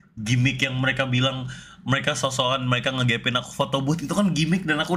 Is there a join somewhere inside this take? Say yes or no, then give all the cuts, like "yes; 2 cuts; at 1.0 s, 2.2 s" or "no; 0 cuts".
no; 0 cuts